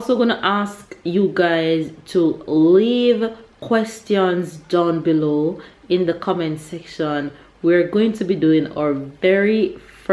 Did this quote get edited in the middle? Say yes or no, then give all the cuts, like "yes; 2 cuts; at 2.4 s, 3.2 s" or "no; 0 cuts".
no; 0 cuts